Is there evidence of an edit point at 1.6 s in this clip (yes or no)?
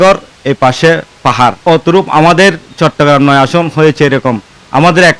yes